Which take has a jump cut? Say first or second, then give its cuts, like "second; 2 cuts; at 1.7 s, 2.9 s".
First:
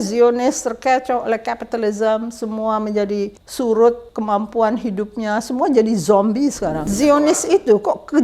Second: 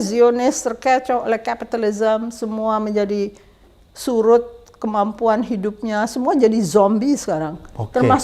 first; 3 cuts; at 3.4 s, 4.1 s, 6.9 s